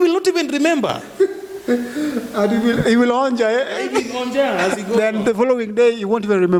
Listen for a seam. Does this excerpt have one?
no; 0 cuts

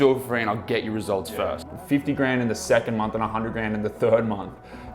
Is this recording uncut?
no; 1 cut; at 1.6 s

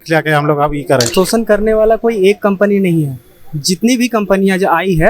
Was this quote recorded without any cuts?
no; 1 cut; at 1.1 s

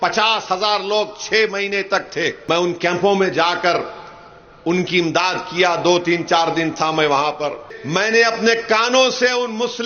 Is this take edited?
yes; 2 cuts; at 2.4 s, 7.7 s

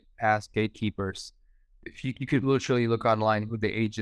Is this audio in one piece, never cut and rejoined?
yes; 0 cuts

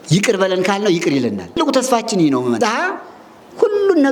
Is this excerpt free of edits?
no; 2 cuts; at 1.6 s, 2.6 s

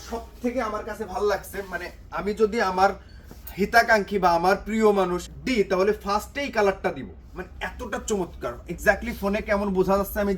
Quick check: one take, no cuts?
no; 1 cut; at 5.3 s

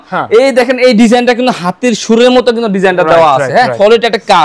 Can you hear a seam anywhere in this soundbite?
yes; 1 cut; at 3.5 s

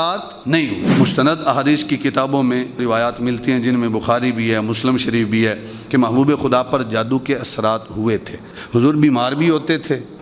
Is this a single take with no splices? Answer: no; 2 cuts; at 0.9 s, 8.4 s

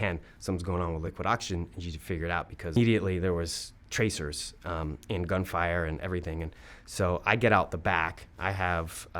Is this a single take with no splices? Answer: no; 2 cuts; at 1.1 s, 2.8 s

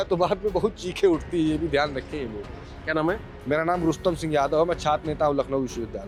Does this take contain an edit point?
no; 0 cuts

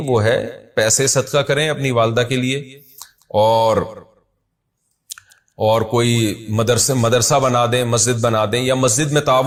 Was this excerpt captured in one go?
yes; 0 cuts

